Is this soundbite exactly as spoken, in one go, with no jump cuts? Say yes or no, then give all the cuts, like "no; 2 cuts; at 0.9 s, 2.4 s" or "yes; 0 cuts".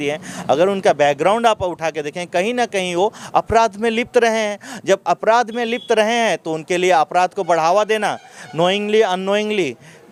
yes; 0 cuts